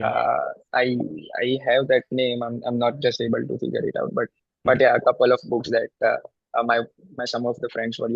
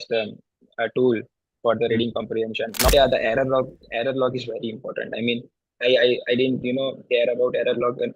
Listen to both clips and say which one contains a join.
second; 1 cut; at 2.9 s

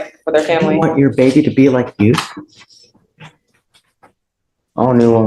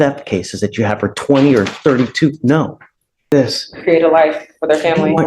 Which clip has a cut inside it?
second; 1 cut; at 3.3 s

